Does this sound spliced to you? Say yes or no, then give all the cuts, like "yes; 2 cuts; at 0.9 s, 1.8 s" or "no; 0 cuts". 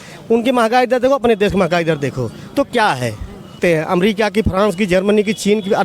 yes; 1 cut; at 3.6 s